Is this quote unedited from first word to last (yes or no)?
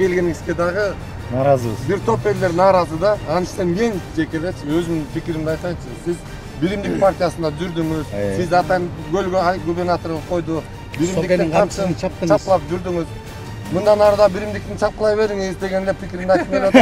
yes